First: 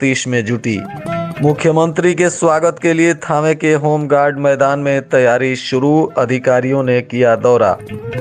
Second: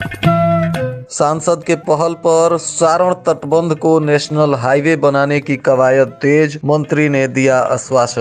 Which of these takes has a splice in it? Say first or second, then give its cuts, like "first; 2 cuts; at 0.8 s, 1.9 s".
second; 1 cut; at 1.0 s